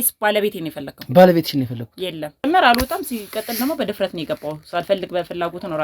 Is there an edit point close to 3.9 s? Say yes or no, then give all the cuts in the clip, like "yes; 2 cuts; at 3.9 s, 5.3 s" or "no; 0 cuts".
no; 1 cut; at 2.4 s